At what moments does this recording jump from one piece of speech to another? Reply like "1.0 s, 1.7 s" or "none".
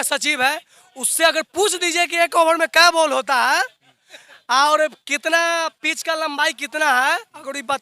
none

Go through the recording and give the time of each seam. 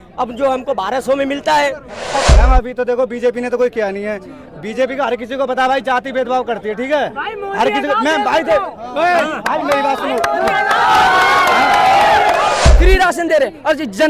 2.2 s, 12.6 s

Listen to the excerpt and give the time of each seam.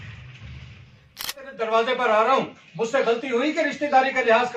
0.9 s

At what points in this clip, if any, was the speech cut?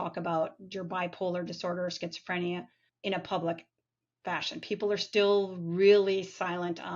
2.9 s

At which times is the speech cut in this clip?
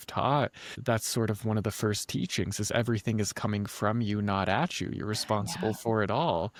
none

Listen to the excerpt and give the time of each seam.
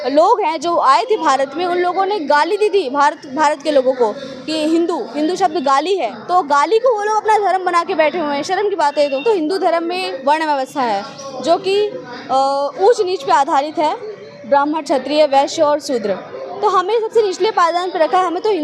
6.2 s, 9.2 s

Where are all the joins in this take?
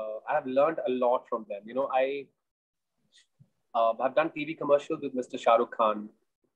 none

